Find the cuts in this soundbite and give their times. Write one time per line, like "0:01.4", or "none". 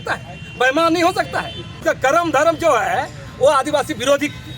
0:01.8